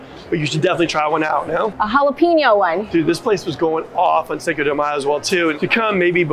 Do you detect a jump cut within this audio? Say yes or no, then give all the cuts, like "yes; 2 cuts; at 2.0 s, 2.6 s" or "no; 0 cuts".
yes; 3 cuts; at 1.8 s, 2.8 s, 5.6 s